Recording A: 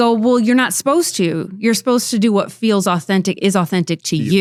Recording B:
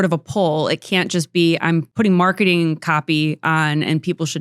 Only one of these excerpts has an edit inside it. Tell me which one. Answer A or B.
B